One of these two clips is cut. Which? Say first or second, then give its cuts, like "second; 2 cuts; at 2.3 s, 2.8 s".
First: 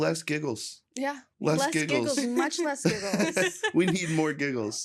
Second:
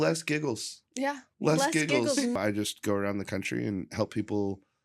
second; 1 cut; at 2.4 s